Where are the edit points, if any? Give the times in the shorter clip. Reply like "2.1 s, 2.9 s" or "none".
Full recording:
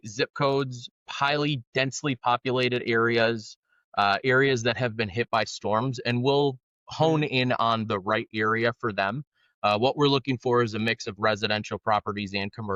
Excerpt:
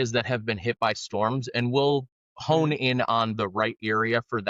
none